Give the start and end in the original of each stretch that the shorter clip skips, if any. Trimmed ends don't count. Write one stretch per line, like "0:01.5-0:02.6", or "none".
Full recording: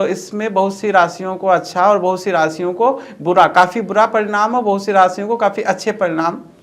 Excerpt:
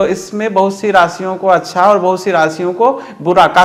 none